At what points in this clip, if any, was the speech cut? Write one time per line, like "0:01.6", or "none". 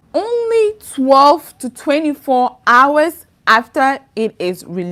none